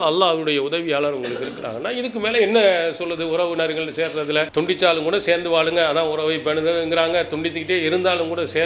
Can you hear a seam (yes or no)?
yes